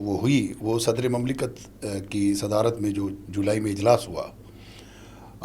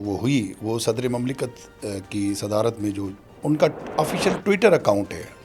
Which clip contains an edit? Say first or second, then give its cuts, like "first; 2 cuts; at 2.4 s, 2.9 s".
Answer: second; 1 cut; at 3.2 s